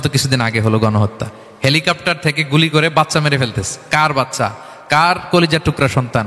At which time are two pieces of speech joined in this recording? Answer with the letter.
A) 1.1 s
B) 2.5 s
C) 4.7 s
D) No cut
D